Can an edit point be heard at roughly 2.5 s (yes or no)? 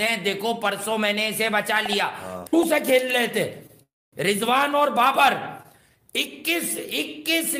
yes